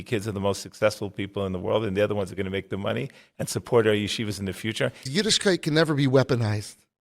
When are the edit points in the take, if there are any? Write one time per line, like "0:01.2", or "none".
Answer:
0:05.1